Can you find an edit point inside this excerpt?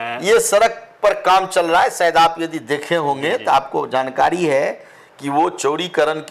no; 0 cuts

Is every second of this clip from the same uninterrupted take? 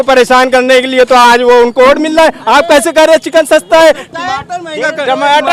yes; 0 cuts

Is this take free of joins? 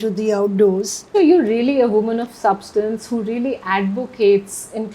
no; 1 cut; at 1.0 s

